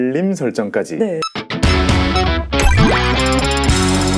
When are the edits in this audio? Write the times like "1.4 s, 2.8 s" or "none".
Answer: 1.3 s